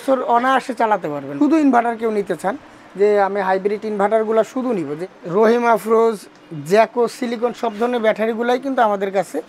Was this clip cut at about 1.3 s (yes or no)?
yes